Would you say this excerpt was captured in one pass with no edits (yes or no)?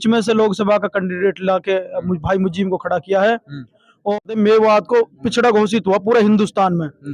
no